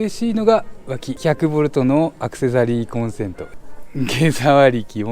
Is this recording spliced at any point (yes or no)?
yes